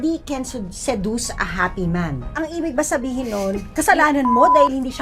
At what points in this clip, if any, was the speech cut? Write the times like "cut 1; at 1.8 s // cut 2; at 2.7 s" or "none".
cut 1; at 2.3 s

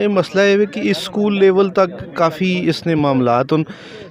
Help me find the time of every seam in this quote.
none

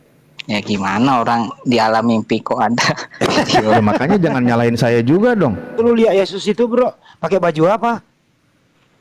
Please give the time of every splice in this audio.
cut 1; at 5.7 s

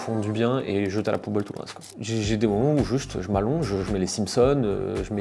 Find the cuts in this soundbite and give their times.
cut 1; at 1.9 s

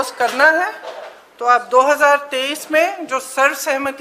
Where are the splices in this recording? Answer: none

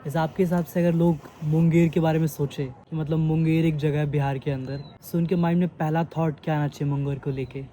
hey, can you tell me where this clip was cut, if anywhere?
none

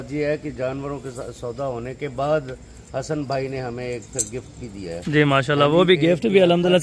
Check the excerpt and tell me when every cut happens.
none

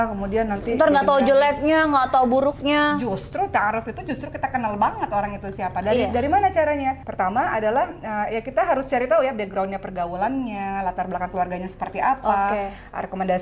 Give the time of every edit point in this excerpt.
none

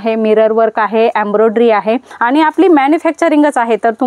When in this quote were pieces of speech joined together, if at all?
cut 1; at 2.1 s

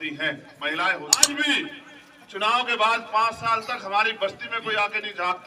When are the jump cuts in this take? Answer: cut 1; at 1.2 s

